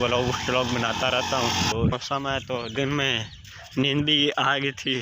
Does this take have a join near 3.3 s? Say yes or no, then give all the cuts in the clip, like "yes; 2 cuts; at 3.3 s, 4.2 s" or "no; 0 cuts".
no; 1 cut; at 1.9 s